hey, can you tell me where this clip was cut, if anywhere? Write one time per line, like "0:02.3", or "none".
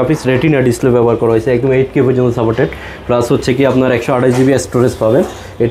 none